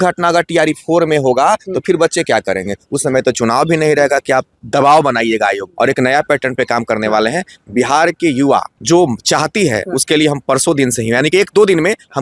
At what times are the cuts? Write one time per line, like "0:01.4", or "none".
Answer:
0:05.7
0:08.7